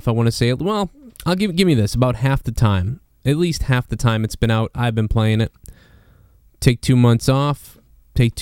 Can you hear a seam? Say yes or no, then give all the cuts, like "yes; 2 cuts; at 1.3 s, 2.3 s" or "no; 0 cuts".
yes; 1 cut; at 3.9 s